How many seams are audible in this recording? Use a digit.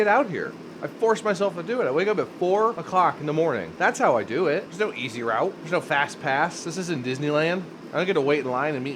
5